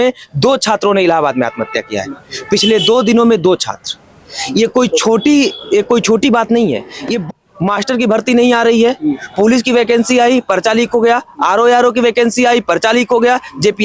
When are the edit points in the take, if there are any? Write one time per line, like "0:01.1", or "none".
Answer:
0:07.3